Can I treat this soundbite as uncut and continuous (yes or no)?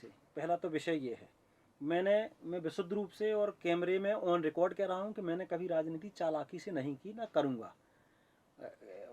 yes